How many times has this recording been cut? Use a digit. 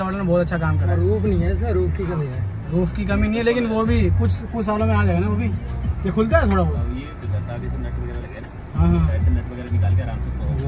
0